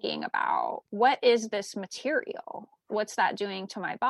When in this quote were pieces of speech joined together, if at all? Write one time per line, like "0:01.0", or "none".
0:02.8